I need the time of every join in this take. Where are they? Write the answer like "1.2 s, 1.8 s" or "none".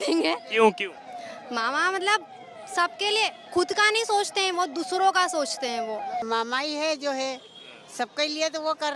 6.2 s